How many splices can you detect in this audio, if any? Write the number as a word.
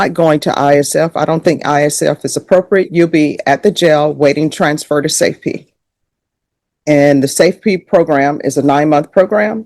zero